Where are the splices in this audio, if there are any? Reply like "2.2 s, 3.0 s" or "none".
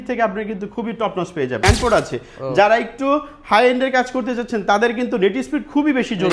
1.6 s